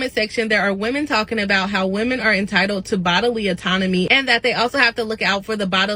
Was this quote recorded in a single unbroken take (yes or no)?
yes